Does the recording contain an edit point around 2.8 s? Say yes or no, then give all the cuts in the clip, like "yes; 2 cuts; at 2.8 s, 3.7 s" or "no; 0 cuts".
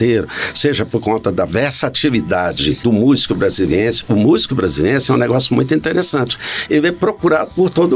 yes; 1 cut; at 2.8 s